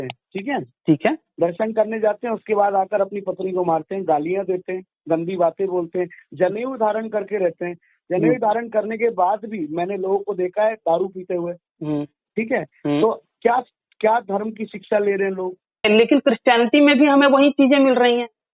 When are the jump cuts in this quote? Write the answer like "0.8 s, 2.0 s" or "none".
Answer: 15.9 s